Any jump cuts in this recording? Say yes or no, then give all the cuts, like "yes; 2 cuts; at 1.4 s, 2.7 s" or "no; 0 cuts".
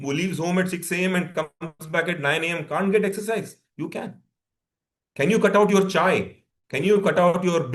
no; 0 cuts